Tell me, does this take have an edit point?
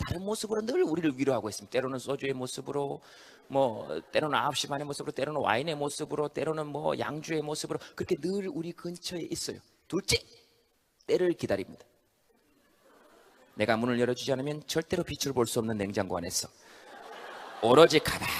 yes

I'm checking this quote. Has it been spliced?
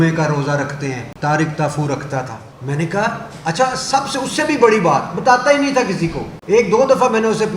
yes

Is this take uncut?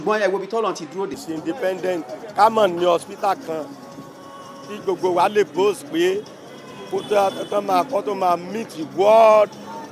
no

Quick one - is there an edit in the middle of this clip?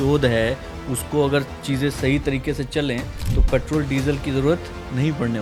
no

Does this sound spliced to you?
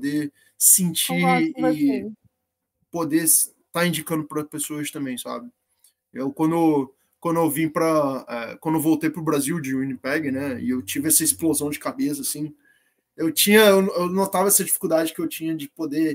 no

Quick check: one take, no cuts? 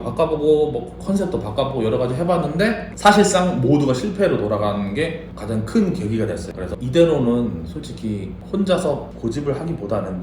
yes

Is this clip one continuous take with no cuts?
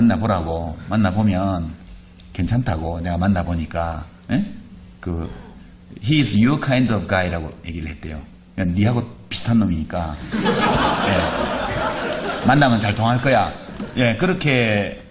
yes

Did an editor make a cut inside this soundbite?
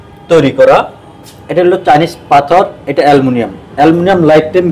no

